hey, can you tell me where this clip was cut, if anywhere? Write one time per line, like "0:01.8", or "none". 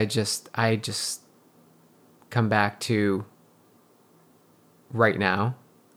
0:04.5